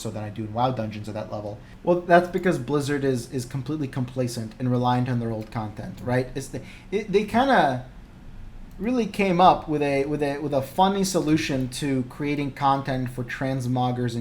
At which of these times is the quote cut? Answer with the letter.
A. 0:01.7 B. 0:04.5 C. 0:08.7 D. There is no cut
A